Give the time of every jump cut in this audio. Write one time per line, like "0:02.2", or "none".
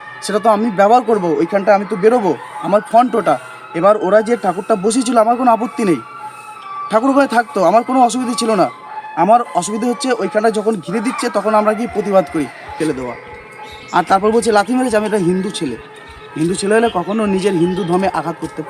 0:12.8